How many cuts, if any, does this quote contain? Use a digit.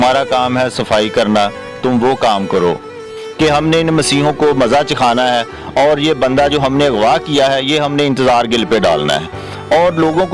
1